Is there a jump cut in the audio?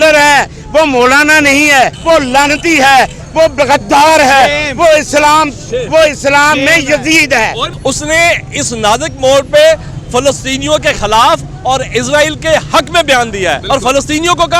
yes; 3 cuts; at 2.0 s, 7.7 s, 13.6 s

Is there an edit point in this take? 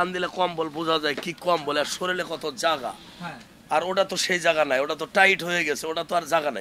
no; 0 cuts

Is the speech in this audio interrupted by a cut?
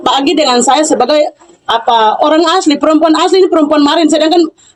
no; 0 cuts

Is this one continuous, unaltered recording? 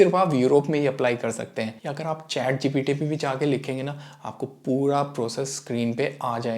no; 1 cut; at 1.8 s

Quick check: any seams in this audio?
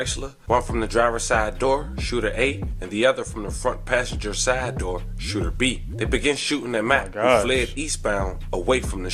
no; 0 cuts

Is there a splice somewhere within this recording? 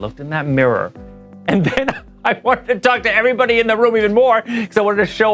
no; 0 cuts

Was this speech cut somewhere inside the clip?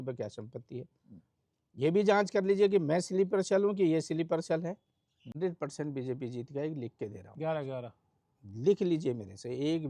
yes; 1 cut; at 5.4 s

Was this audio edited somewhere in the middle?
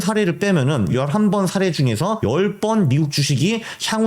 yes; 2 cuts; at 0.9 s, 2.2 s

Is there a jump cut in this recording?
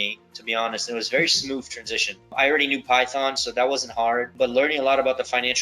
yes; 2 cuts; at 2.3 s, 4.3 s

